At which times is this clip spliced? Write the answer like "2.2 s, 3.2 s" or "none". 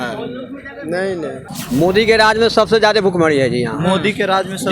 1.5 s